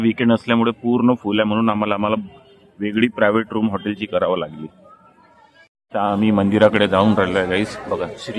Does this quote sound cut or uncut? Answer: uncut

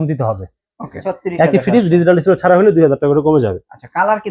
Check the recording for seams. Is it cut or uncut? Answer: cut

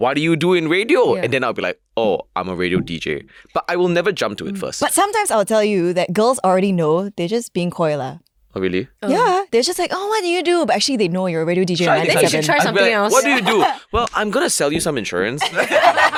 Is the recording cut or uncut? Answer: uncut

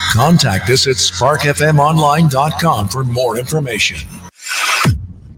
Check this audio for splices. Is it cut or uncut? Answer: uncut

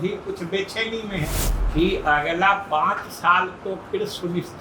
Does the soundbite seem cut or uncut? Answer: cut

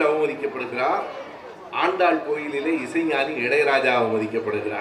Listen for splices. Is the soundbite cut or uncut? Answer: uncut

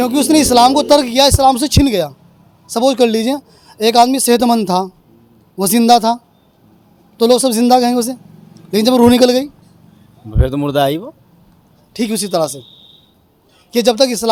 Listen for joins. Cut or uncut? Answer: uncut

